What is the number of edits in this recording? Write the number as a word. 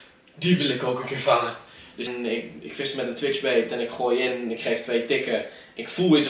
one